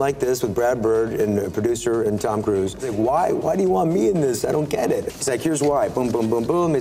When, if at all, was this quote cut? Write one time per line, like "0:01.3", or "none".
0:02.9
0:05.1